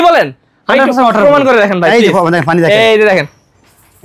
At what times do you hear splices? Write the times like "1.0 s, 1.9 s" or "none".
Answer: none